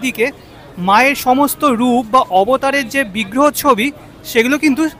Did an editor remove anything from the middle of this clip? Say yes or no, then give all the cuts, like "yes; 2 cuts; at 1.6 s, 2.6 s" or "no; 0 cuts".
no; 0 cuts